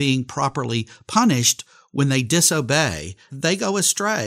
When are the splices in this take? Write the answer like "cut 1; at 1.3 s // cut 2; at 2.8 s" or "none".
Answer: cut 1; at 3.3 s